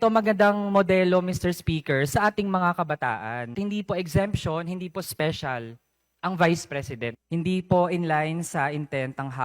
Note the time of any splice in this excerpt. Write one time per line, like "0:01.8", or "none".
0:03.5
0:07.2

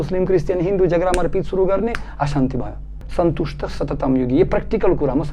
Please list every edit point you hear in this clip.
0:03.0

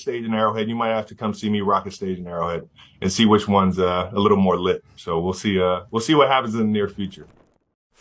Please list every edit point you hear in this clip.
none

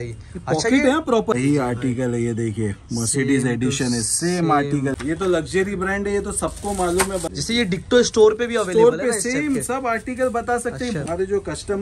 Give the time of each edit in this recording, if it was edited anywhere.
0:01.3
0:04.9
0:07.3
0:11.0

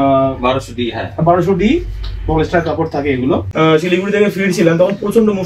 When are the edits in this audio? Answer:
0:03.5

